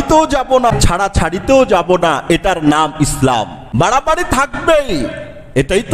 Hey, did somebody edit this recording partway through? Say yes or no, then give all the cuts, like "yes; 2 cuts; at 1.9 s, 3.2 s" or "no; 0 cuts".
yes; 2 cuts; at 0.7 s, 3.6 s